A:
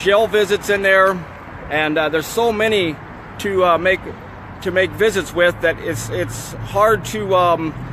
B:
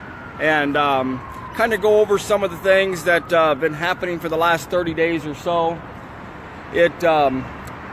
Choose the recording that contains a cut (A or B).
A